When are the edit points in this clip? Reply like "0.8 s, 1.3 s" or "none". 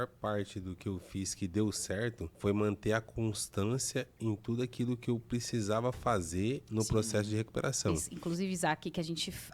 2.3 s, 8.1 s

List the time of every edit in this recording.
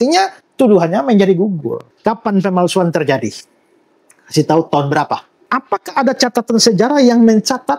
1.8 s, 5.3 s

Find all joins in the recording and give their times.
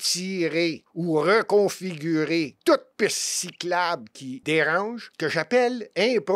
0.9 s, 2.5 s, 4.3 s, 5.0 s

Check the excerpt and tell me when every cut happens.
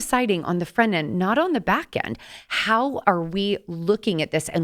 none

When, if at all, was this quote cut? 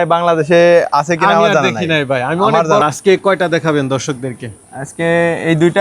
2.8 s

